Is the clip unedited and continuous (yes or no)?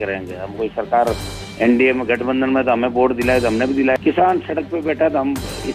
no